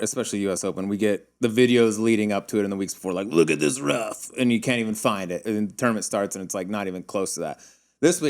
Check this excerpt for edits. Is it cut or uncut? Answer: cut